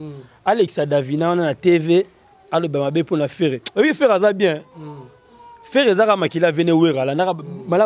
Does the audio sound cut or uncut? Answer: uncut